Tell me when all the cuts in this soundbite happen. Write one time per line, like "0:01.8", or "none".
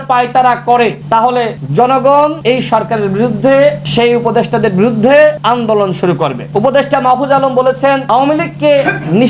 0:01.1
0:02.4
0:03.8
0:05.4
0:06.4